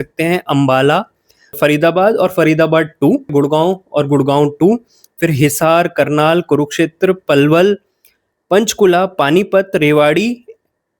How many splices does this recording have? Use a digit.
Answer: 2